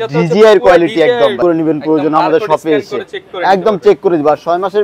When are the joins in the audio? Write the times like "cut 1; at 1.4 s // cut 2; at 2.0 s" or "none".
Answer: cut 1; at 1.4 s

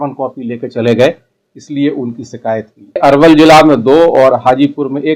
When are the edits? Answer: cut 1; at 3.0 s

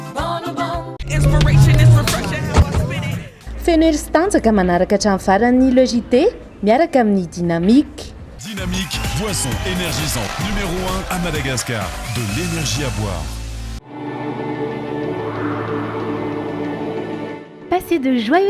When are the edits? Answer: cut 1; at 1.0 s // cut 2; at 13.8 s

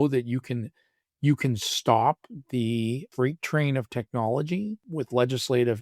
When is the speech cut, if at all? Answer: cut 1; at 3.1 s // cut 2; at 4.8 s

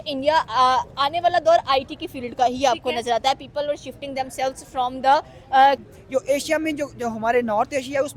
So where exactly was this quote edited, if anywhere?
cut 1; at 5.8 s

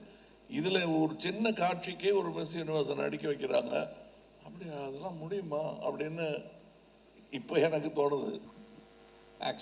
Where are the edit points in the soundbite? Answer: cut 1; at 8.5 s

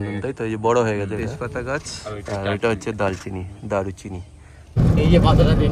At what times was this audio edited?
cut 1; at 1.2 s // cut 2; at 4.8 s

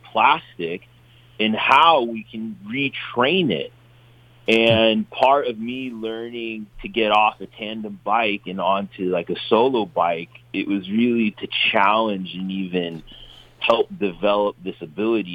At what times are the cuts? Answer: none

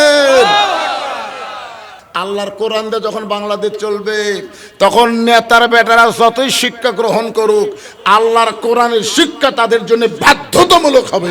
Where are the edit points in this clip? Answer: cut 1; at 1.8 s

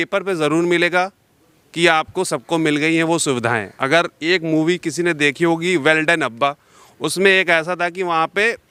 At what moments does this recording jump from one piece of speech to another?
none

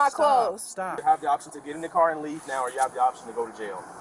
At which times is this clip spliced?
cut 1; at 0.9 s

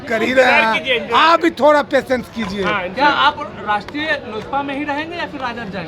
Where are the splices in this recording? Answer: none

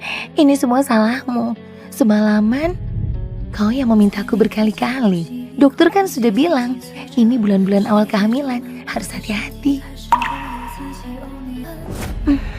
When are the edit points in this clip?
cut 1; at 11.7 s

